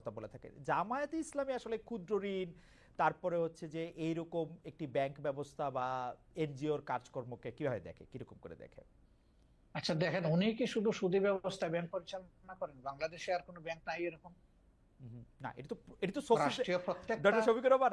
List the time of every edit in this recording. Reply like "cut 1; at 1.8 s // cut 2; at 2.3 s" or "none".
cut 1; at 14.3 s